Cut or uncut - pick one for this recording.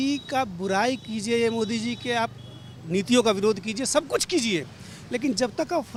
uncut